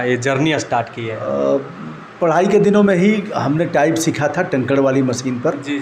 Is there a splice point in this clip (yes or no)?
no